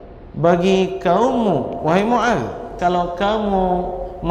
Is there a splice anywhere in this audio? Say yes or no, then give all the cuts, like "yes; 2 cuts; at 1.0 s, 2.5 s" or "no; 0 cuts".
yes; 1 cut; at 2.7 s